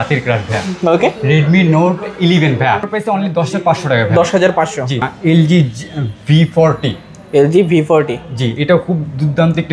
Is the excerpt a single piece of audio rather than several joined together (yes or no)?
no